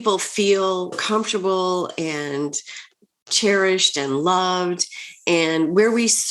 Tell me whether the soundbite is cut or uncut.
cut